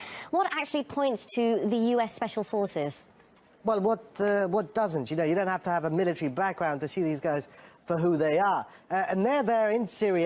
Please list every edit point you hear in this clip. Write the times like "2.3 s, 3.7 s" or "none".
2.8 s